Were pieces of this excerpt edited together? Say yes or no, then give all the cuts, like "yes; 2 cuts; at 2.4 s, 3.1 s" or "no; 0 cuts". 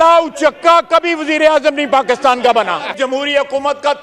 yes; 1 cut; at 2.9 s